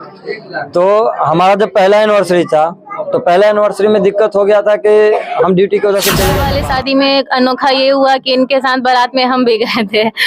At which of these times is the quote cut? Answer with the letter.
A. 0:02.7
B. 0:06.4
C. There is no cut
B